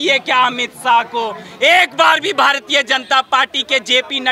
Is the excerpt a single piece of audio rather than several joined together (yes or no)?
yes